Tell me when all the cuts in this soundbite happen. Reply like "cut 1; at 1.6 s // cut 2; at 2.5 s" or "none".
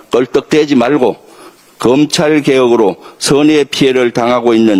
none